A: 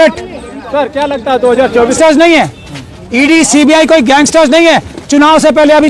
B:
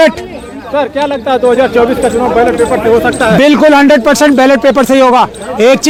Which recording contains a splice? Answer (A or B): A